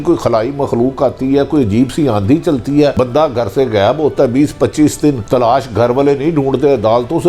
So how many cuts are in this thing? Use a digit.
2